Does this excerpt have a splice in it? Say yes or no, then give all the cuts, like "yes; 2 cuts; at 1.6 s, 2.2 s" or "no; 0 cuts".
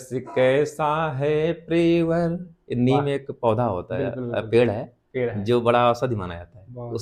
no; 0 cuts